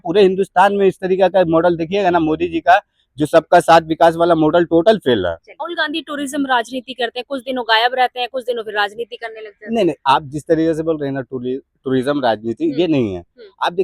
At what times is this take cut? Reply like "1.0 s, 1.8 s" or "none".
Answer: 5.6 s